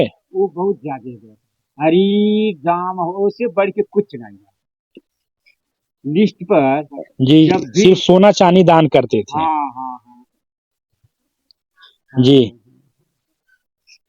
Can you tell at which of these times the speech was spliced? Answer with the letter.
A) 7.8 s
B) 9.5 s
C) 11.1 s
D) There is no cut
A